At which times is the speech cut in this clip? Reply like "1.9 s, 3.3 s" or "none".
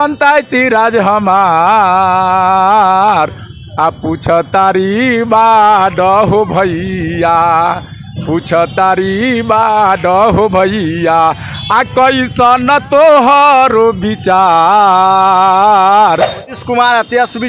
16.5 s